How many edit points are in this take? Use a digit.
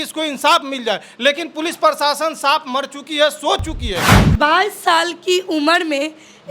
1